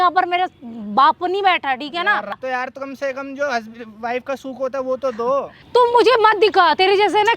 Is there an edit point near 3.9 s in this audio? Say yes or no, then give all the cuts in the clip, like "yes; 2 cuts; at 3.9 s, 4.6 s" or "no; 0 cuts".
no; 2 cuts; at 2.4 s, 5.6 s